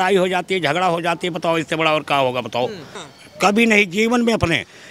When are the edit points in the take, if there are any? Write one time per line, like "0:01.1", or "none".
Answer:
0:02.8